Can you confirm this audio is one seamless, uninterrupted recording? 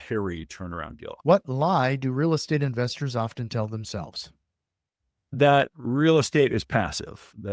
no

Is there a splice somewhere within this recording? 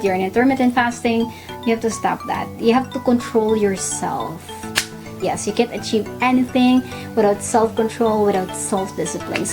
yes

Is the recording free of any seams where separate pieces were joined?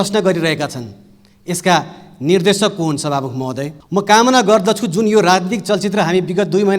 no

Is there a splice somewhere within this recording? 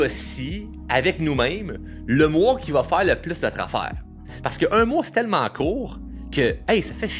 no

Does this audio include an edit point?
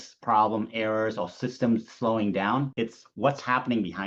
no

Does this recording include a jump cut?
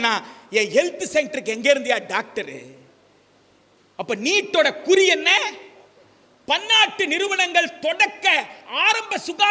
no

